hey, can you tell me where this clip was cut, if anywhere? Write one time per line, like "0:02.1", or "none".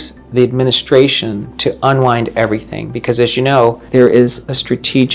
0:03.8